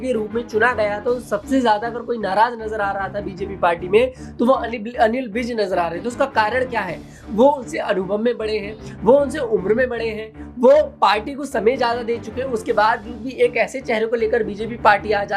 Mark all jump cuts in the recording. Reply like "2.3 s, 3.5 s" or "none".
none